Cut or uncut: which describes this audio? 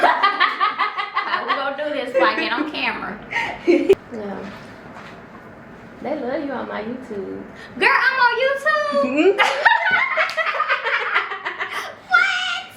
cut